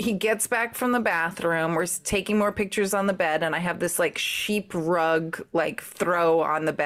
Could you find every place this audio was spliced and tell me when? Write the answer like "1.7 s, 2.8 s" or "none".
none